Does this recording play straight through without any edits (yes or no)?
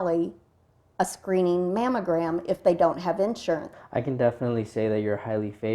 no